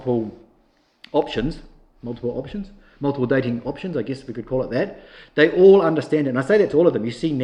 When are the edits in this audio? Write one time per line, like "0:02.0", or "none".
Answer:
none